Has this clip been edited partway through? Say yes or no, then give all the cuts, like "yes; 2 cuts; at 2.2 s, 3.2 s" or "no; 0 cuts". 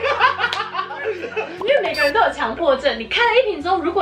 yes; 1 cut; at 1.5 s